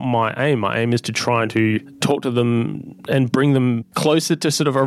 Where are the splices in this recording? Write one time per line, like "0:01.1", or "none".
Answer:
0:02.0
0:03.9